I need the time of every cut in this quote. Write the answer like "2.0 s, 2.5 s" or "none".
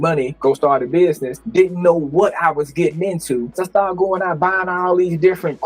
3.6 s